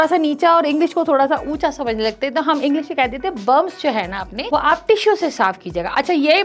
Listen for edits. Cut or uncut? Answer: uncut